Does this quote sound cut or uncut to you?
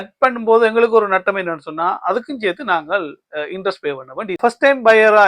cut